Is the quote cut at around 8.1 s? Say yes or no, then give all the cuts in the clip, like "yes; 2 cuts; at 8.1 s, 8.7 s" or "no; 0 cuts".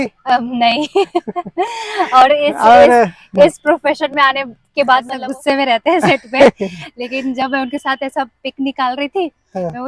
no; 1 cut; at 5.1 s